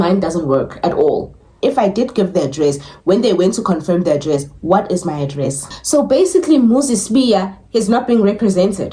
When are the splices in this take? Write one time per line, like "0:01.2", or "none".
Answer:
0:01.6
0:05.7